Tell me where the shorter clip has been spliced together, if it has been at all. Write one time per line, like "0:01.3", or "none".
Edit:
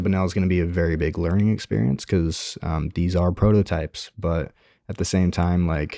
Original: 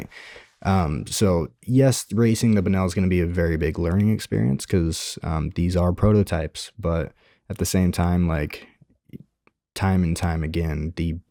none